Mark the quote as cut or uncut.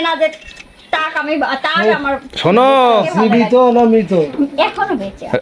uncut